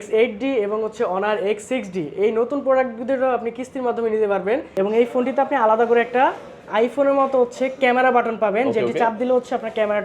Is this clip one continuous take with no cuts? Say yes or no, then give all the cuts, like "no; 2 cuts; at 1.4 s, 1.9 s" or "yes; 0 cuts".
no; 1 cut; at 4.7 s